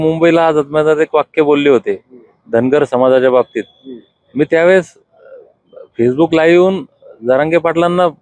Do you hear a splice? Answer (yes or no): no